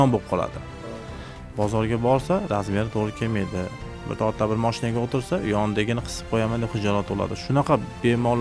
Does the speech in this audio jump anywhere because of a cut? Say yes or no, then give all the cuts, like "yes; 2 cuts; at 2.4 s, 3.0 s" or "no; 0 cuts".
no; 0 cuts